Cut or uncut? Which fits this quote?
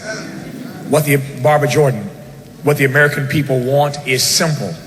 uncut